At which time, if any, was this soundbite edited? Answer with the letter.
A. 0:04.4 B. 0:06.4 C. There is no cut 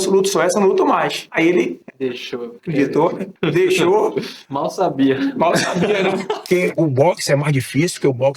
B